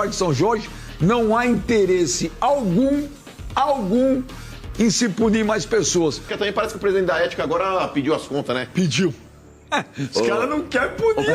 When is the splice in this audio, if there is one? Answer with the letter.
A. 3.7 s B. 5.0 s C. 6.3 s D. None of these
C